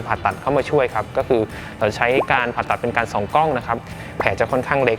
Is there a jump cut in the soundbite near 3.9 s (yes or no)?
yes